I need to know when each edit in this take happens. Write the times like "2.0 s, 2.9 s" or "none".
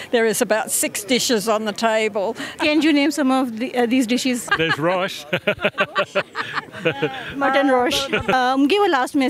2.6 s, 4.4 s, 6.6 s, 8.3 s